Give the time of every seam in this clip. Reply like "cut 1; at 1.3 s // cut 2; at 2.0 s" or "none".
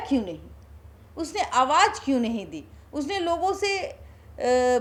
none

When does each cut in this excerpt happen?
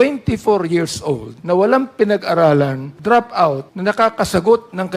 cut 1; at 1.3 s // cut 2; at 2.9 s // cut 3; at 3.7 s

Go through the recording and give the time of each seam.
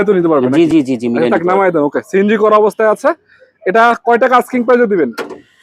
none

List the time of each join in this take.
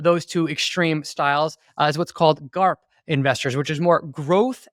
none

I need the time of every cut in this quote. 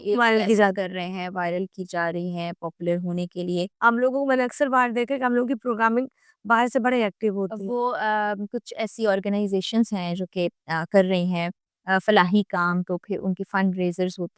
cut 1; at 3.7 s

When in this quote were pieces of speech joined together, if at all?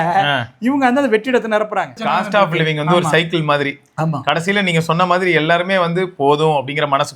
cut 1; at 2.0 s

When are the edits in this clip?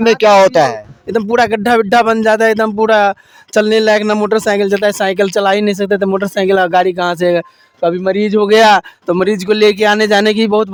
none

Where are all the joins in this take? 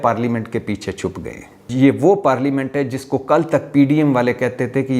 cut 1; at 1.6 s

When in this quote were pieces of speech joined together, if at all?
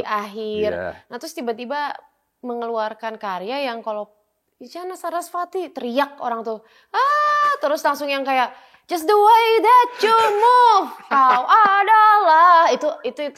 none

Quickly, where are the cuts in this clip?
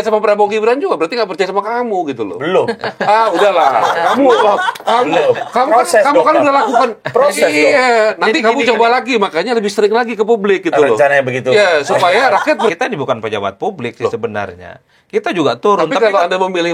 cut 1; at 12.7 s

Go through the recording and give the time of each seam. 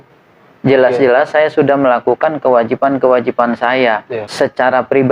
cut 1; at 4.2 s

